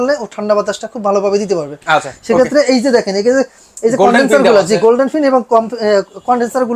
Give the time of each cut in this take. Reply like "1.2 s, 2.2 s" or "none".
none

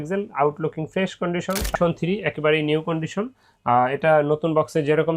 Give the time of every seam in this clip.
1.7 s

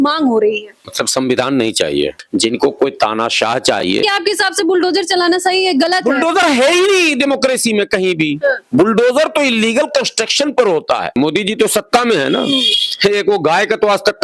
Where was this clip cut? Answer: 2.2 s, 4.0 s, 11.1 s

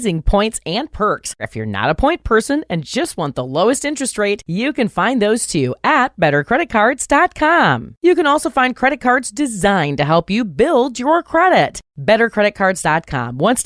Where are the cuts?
none

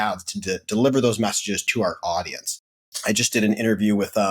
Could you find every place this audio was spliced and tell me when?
1.6 s, 2.9 s

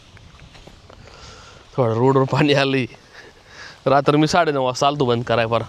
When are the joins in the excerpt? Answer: none

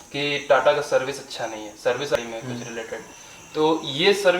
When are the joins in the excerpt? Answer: 2.1 s

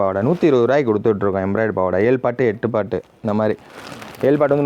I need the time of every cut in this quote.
none

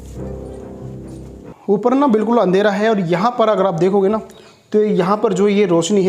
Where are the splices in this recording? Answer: 1.5 s

